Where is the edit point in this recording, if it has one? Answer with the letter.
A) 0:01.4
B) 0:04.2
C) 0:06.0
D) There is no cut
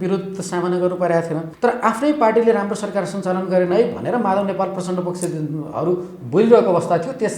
A